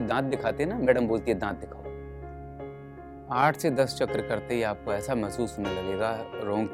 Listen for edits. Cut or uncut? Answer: cut